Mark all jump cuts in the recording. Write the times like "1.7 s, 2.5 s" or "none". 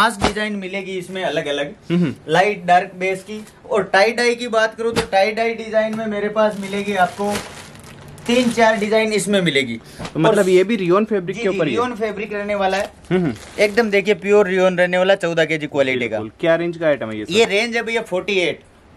none